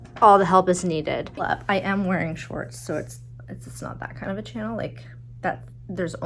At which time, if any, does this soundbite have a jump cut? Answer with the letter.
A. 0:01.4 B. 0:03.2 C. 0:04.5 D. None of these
A